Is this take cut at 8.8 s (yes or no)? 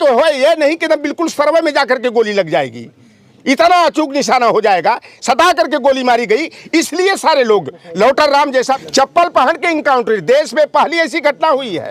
yes